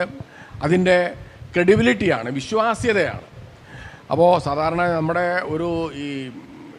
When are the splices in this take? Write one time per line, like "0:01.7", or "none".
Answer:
none